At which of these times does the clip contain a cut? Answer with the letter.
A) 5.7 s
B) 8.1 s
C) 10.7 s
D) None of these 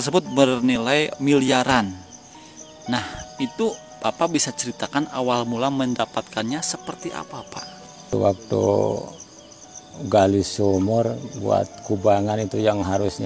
B